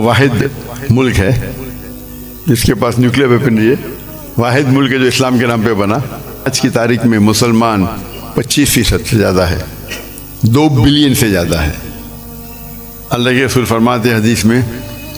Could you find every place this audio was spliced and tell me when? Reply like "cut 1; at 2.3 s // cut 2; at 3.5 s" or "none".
cut 1; at 6.5 s